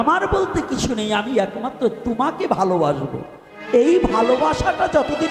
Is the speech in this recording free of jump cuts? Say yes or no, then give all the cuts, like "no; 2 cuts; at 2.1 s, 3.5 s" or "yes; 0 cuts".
yes; 0 cuts